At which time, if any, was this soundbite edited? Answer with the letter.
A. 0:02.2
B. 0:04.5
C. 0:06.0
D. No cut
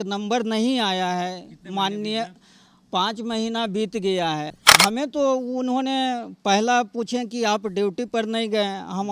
B